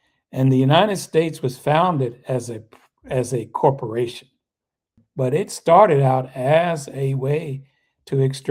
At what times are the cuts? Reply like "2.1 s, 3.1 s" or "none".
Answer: 5.0 s